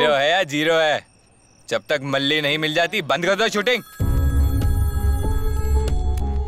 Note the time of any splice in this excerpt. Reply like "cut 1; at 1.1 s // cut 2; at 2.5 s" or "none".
cut 1; at 3.9 s